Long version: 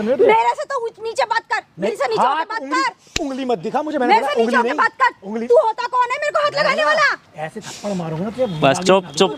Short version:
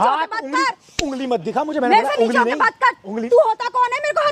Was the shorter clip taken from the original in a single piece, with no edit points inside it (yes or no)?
yes